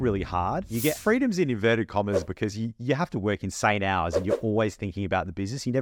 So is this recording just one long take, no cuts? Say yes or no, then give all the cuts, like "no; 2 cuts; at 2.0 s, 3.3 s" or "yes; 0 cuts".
no; 2 cuts; at 1.0 s, 2.3 s